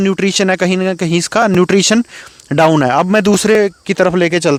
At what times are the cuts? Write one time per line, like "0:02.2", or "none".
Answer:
none